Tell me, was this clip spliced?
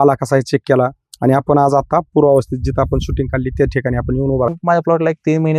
yes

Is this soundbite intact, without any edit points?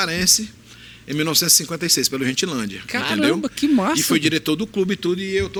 yes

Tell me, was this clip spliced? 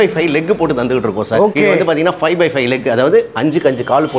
no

